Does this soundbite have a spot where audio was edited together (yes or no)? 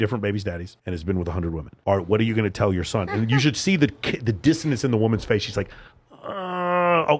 no